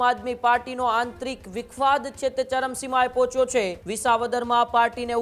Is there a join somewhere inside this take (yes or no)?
yes